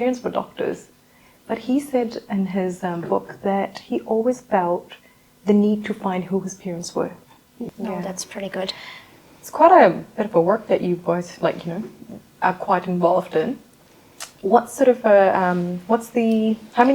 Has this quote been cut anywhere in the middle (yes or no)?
yes